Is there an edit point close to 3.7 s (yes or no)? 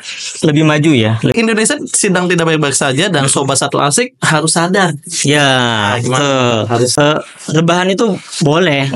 no